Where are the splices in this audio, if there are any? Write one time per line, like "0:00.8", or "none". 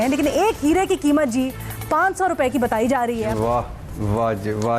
0:03.3